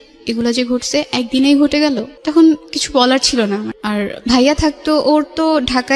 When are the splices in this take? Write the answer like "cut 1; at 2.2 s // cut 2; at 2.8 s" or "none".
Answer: cut 1; at 2.1 s // cut 2; at 3.7 s